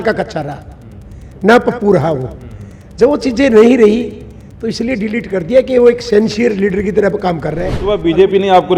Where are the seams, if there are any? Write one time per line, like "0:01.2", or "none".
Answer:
0:07.8